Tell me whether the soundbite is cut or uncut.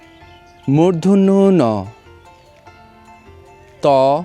cut